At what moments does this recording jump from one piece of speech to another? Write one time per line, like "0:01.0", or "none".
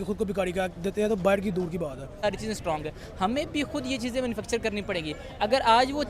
0:02.0